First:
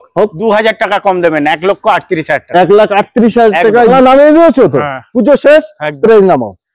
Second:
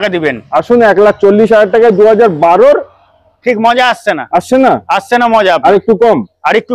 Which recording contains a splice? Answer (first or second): first